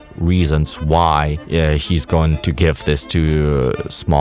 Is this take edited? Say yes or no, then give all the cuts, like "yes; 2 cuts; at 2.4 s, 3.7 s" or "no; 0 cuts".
yes; 2 cuts; at 1.4 s, 2.4 s